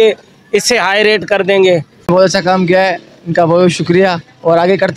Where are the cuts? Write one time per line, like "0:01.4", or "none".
0:02.1